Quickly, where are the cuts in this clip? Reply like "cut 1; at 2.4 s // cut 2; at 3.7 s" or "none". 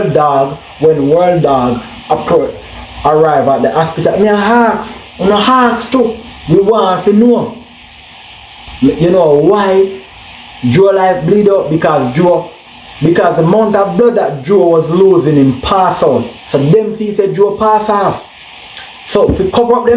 none